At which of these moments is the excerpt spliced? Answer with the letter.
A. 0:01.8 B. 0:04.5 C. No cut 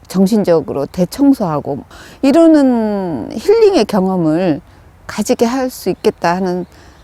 A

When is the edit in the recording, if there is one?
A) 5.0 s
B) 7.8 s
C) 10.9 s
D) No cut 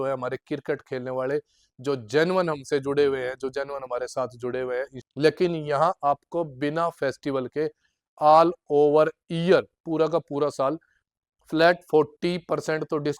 A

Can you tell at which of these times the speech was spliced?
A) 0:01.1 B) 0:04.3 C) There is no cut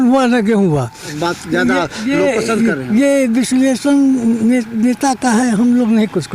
A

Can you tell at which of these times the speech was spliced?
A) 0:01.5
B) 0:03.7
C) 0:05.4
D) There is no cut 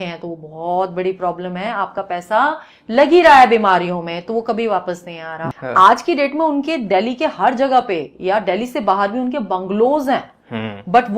C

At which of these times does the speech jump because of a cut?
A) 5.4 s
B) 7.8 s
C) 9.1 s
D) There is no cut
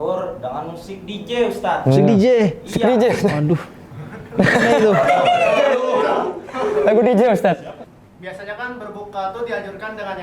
B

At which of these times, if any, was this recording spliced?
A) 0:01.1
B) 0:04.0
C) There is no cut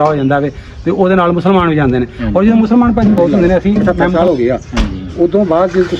B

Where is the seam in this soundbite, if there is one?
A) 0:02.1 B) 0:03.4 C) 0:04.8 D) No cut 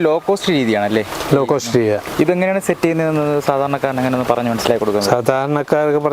A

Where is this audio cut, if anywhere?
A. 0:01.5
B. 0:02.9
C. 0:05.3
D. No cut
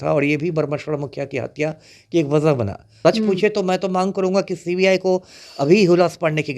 B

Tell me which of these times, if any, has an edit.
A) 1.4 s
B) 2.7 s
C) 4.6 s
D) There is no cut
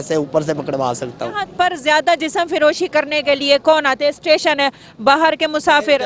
A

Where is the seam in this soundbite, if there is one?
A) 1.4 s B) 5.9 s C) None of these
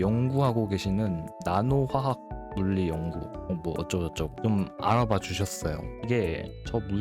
B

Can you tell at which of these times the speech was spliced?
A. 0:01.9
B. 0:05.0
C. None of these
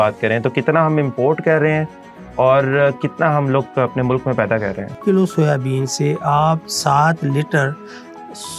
B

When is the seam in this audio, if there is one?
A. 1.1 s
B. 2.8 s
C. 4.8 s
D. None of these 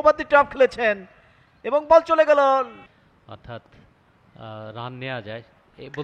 B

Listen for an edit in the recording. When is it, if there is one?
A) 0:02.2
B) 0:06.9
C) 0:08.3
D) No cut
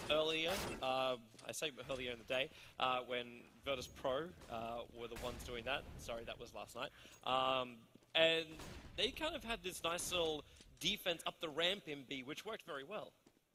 D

